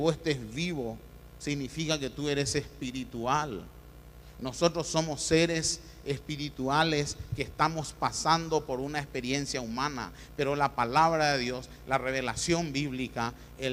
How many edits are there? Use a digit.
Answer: 1